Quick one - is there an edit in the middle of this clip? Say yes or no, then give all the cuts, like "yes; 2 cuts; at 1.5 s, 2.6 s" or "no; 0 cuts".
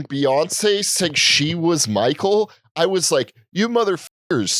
no; 0 cuts